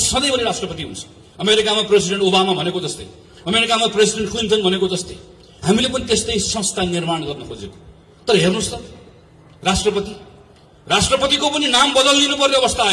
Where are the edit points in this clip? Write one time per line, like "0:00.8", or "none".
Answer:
none